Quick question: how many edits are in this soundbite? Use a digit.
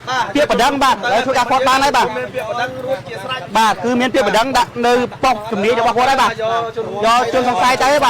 1